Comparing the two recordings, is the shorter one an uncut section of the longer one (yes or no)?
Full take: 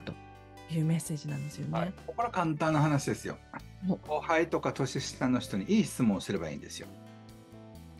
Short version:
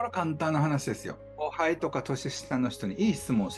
no